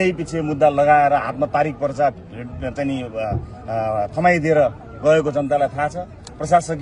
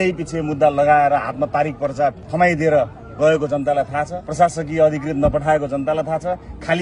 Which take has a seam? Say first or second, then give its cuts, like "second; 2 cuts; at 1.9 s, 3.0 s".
second; 2 cuts; at 2.3 s, 4.2 s